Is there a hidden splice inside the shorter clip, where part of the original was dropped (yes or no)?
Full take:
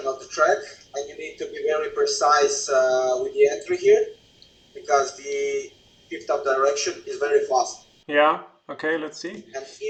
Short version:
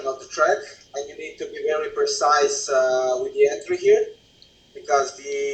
no